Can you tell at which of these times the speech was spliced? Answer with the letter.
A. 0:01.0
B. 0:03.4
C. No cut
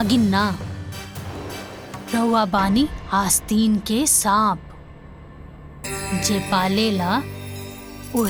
C